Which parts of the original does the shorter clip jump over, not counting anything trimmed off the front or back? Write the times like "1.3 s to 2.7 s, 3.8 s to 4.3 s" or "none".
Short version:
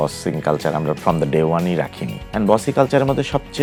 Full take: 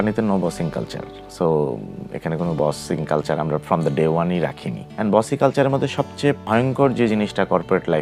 none